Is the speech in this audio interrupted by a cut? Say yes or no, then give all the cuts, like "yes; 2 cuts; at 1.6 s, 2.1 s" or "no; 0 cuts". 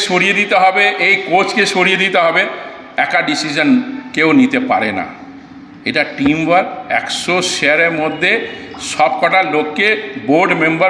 no; 0 cuts